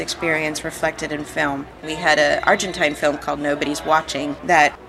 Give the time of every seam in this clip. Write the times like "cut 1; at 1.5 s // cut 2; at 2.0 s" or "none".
cut 1; at 1.8 s